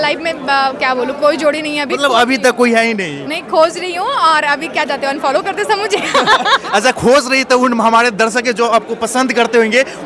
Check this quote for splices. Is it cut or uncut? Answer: uncut